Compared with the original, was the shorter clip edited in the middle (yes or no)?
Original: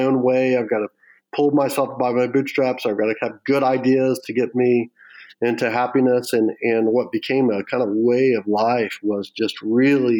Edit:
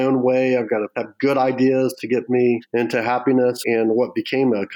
yes